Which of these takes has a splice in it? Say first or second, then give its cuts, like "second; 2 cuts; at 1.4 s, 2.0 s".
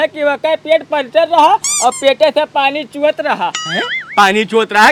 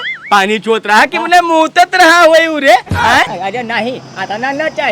second; 1 cut; at 3.3 s